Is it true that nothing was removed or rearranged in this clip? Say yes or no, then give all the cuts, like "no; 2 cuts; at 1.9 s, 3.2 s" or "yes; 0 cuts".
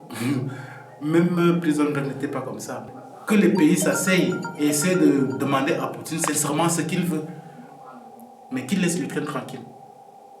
no; 1 cut; at 2.9 s